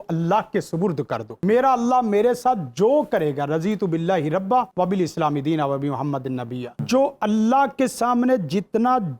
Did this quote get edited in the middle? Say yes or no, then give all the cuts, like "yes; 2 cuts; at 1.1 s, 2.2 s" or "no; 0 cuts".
yes; 3 cuts; at 1.4 s, 4.7 s, 6.8 s